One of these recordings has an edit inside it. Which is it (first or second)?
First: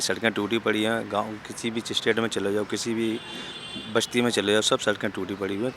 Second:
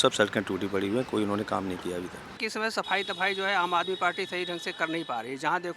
second